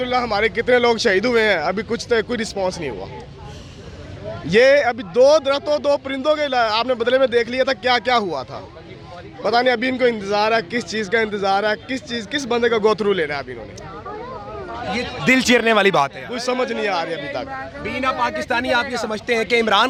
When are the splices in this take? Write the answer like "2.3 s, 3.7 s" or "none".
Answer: none

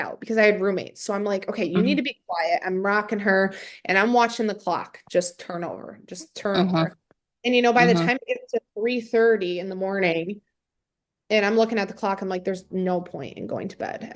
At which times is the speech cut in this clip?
none

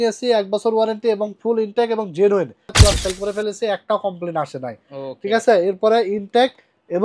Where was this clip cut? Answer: 2.8 s

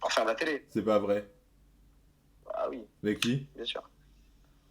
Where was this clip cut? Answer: none

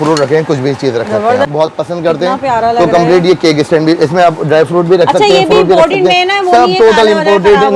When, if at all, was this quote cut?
1.5 s

